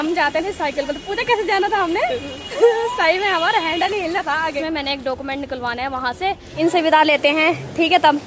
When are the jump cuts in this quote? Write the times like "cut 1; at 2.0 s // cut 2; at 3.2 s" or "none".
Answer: cut 1; at 4.6 s // cut 2; at 6.5 s